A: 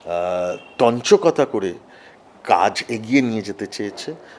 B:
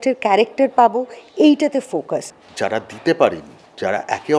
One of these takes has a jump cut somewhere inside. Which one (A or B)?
B